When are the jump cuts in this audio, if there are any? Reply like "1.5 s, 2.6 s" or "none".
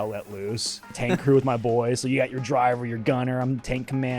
1.0 s